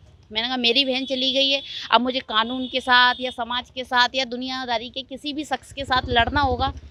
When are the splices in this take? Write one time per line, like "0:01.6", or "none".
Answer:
none

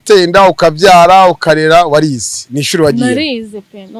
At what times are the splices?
none

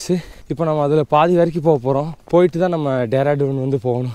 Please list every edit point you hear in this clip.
none

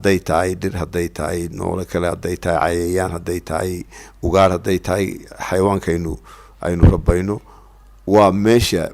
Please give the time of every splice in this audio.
none

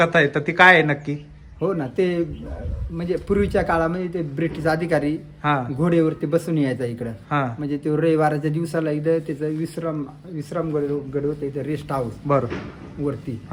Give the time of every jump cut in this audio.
none

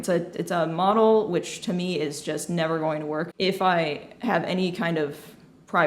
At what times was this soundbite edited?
0:03.3

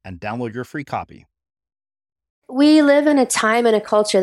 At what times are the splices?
0:02.4

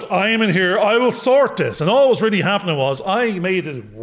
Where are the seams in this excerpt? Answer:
none

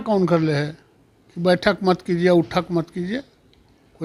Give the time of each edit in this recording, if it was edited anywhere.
none

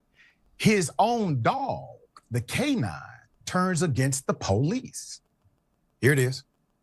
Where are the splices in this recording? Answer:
0:01.4

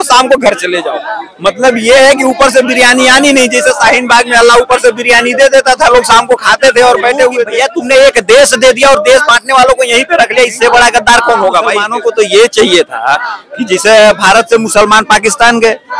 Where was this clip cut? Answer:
0:07.5
0:11.9

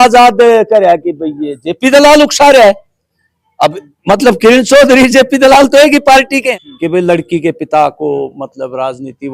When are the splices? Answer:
0:06.5

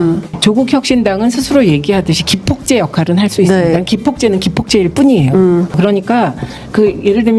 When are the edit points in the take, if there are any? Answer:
0:05.8

